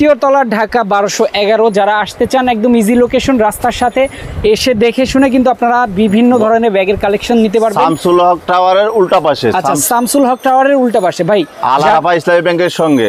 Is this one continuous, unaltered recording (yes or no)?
yes